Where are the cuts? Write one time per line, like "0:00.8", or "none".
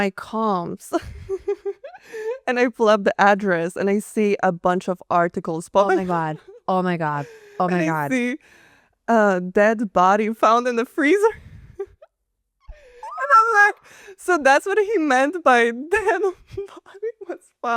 none